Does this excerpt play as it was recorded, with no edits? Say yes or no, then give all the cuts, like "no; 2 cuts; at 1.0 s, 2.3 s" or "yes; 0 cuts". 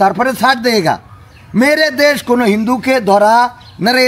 yes; 0 cuts